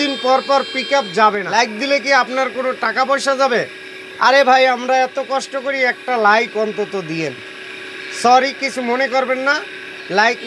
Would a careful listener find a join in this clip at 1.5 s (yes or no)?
yes